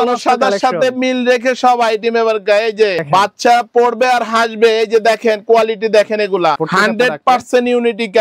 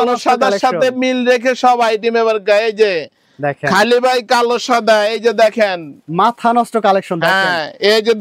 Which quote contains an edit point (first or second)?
first